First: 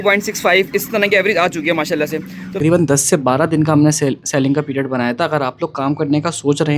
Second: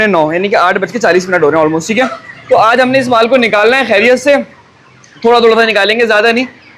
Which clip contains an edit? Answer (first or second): first